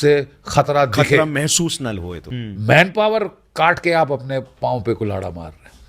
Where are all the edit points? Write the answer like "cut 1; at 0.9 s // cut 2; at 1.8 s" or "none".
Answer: cut 1; at 2.3 s

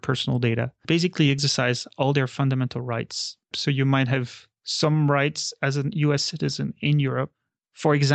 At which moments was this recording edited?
cut 1; at 3.5 s // cut 2; at 7.3 s

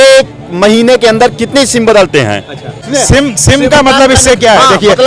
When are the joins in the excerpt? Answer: cut 1; at 2.8 s

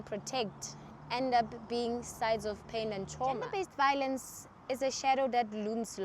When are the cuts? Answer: cut 1; at 3.5 s

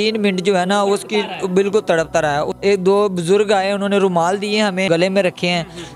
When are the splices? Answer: cut 1; at 2.5 s // cut 2; at 4.9 s

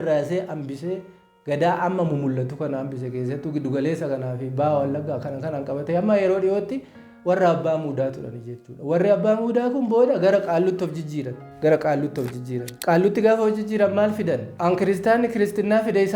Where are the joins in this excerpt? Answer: cut 1; at 11.4 s // cut 2; at 12.7 s // cut 3; at 14.5 s

